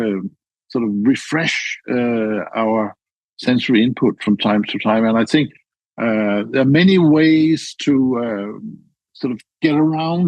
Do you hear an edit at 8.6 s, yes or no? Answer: no